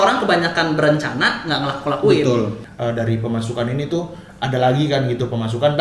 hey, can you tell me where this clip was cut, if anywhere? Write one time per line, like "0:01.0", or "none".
0:02.7